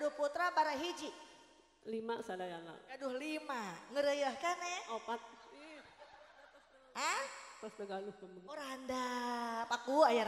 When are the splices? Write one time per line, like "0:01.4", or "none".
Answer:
none